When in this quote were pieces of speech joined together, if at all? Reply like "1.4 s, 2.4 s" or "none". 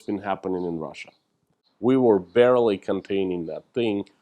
1.6 s